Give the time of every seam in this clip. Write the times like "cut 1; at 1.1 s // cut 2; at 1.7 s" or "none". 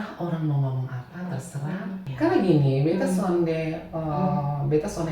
cut 1; at 2.0 s